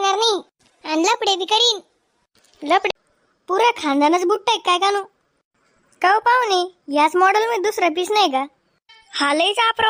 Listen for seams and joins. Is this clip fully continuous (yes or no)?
no